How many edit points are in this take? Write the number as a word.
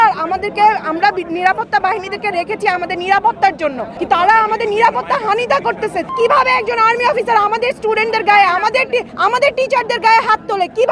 three